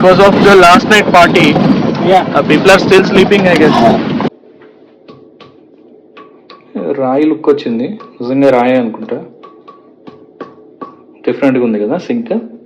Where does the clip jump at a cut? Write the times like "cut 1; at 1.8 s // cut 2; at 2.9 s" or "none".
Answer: cut 1; at 4.3 s